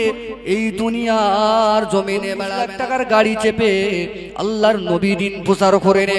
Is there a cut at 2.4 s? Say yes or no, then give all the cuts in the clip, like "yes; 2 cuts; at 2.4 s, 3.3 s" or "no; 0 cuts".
yes; 1 cut; at 2.4 s